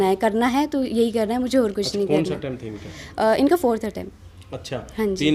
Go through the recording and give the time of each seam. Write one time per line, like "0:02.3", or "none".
none